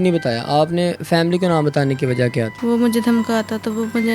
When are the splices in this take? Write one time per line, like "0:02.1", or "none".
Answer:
0:02.5